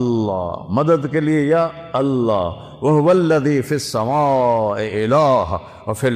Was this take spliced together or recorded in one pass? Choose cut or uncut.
uncut